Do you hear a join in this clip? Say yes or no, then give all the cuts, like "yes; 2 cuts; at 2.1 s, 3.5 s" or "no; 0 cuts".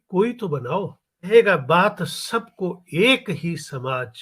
yes; 1 cut; at 1.3 s